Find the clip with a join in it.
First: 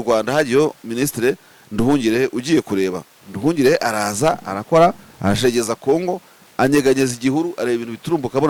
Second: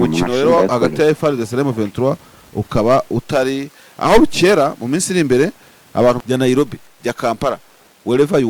second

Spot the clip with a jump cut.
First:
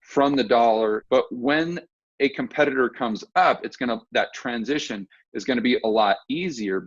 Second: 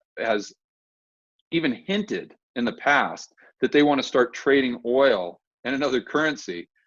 first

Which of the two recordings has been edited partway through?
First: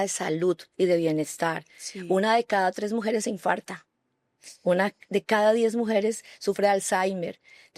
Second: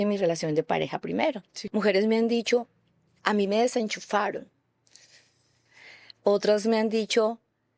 second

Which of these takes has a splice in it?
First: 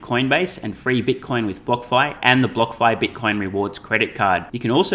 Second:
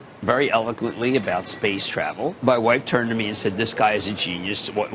second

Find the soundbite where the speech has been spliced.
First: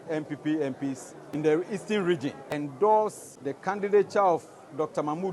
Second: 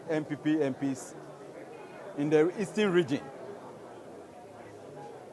first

